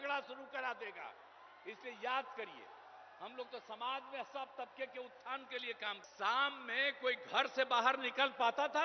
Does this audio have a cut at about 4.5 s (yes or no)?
no